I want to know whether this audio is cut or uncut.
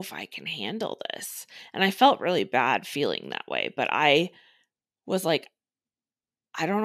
uncut